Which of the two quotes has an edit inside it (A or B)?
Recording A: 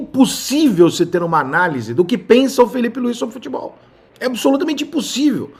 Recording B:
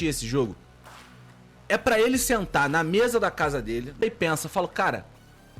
B